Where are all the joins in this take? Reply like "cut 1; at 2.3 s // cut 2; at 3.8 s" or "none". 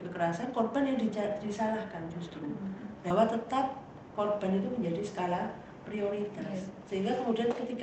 cut 1; at 3.1 s